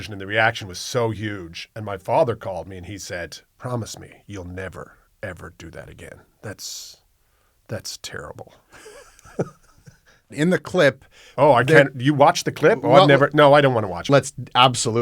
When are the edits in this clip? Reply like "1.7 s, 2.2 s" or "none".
3.5 s, 10.3 s, 14.0 s